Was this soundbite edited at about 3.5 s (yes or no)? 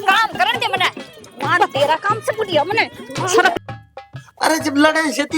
yes